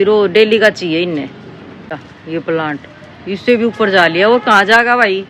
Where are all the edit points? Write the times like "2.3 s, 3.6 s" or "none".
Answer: 2.1 s